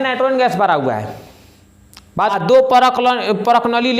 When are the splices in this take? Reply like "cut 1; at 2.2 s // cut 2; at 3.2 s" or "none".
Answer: cut 1; at 2.4 s